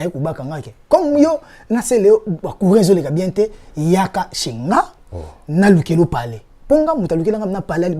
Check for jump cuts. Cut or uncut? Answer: uncut